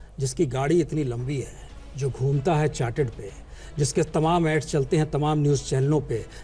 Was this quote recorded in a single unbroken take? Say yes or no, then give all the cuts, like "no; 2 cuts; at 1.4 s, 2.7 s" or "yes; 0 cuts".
yes; 0 cuts